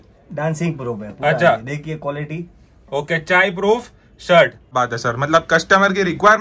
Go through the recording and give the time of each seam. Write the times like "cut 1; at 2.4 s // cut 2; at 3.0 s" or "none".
cut 1; at 4.7 s